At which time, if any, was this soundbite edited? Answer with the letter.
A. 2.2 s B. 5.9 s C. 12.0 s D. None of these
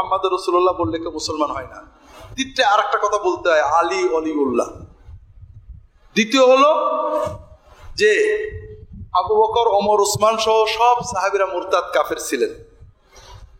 D